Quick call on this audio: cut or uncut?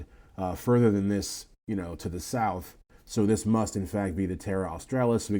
uncut